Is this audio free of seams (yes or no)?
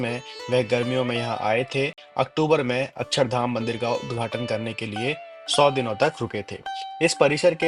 yes